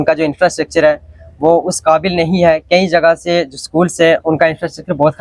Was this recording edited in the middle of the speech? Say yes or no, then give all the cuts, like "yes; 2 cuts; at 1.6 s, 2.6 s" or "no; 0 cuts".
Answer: no; 0 cuts